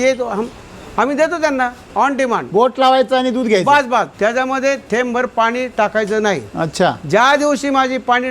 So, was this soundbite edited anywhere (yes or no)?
yes